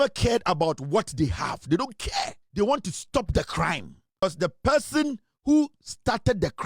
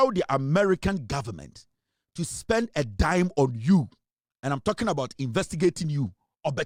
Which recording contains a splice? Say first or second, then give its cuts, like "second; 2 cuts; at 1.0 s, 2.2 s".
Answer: first; 2 cuts; at 2.4 s, 4.2 s